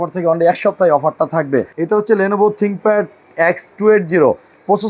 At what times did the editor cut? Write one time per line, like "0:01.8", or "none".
0:01.7